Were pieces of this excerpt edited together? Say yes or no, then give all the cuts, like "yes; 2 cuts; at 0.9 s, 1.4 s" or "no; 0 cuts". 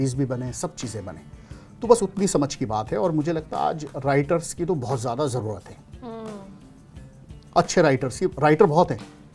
no; 0 cuts